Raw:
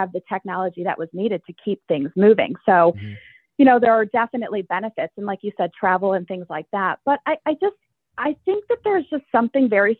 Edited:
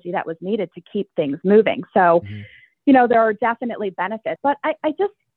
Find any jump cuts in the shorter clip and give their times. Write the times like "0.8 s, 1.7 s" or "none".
4.4 s